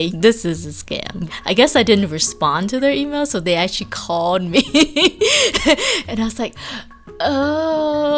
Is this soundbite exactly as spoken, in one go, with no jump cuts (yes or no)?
no